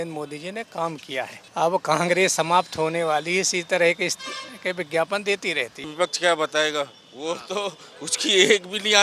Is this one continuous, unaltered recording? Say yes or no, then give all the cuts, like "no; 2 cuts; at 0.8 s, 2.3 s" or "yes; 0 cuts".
no; 2 cuts; at 1.4 s, 5.9 s